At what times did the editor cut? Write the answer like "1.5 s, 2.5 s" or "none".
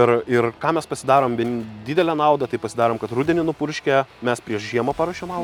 none